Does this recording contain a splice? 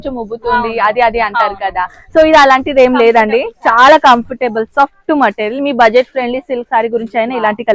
no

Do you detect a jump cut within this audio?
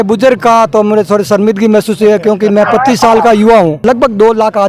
yes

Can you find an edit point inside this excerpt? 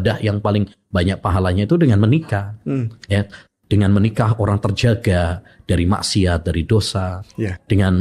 no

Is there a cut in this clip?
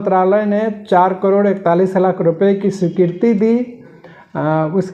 no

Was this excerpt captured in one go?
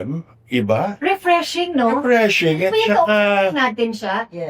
yes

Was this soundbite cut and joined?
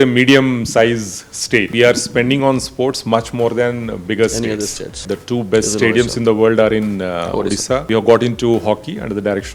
yes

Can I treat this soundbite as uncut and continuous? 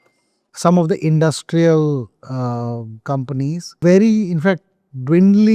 no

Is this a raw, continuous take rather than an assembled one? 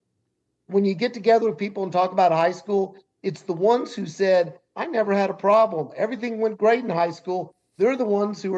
yes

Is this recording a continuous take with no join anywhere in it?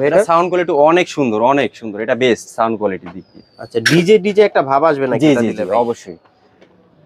yes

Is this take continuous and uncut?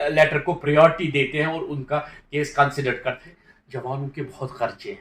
no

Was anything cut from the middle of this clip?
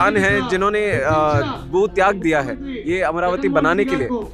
no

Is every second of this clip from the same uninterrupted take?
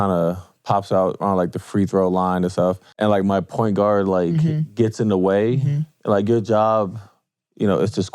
no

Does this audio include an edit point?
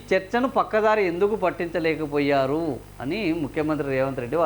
no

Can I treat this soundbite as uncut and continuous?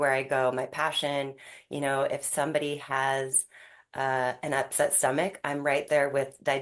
yes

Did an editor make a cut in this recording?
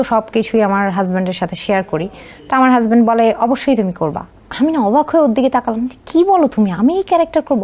no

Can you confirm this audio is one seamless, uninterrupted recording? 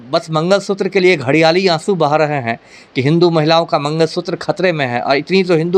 yes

